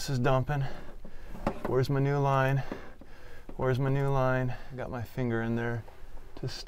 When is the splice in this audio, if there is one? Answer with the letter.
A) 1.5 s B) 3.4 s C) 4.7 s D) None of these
C